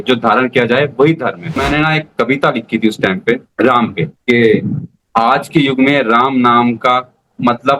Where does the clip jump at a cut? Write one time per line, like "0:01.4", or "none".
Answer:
0:01.6